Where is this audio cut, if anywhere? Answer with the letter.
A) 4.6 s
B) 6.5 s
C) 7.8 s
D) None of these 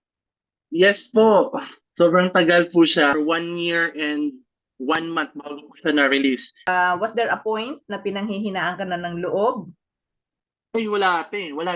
B